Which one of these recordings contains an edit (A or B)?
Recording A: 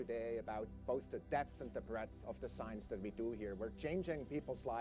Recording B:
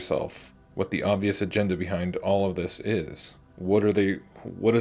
A